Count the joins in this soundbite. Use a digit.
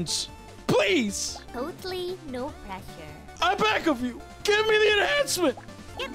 0